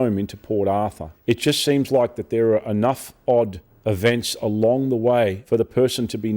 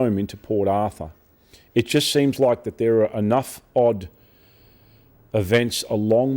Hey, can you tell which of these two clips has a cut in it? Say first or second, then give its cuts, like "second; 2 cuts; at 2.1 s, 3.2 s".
first; 3 cuts; at 1.1 s, 3.7 s, 5.4 s